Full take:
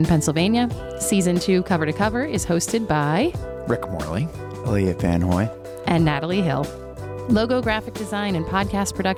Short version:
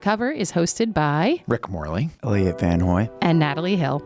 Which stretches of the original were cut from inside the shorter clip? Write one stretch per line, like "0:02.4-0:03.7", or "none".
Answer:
0:03.6-0:04.1
0:05.5-0:05.8